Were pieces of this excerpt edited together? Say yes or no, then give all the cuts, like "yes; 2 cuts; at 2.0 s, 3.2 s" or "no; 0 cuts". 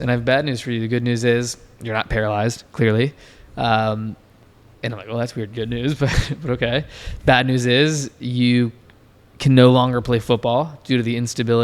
no; 0 cuts